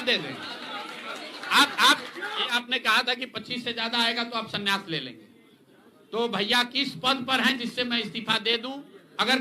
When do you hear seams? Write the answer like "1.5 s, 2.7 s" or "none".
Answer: 2.5 s